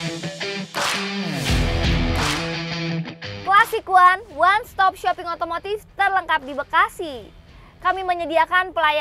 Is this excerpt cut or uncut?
cut